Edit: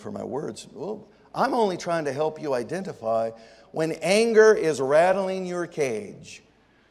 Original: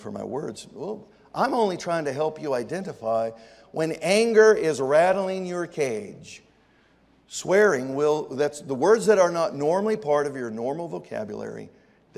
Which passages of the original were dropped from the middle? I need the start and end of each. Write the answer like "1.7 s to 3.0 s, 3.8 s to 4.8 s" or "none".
none